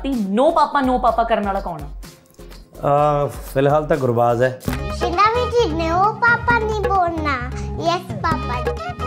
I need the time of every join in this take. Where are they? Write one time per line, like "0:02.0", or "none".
none